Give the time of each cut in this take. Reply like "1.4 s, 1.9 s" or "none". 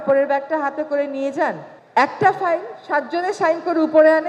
1.7 s